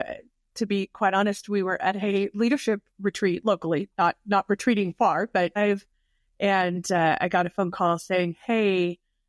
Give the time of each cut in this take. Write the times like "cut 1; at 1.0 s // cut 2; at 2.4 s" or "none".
cut 1; at 5.6 s